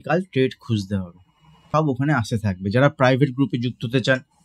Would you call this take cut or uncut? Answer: cut